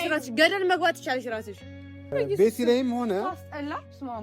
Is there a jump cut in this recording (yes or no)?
yes